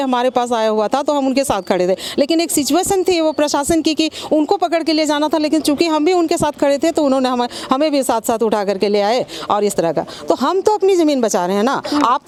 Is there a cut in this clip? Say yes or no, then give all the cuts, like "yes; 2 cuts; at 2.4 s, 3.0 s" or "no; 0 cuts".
no; 0 cuts